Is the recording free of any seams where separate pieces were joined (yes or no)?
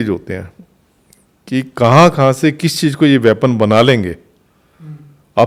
yes